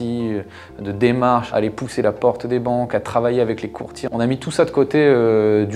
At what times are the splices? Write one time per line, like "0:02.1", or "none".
0:01.5
0:03.9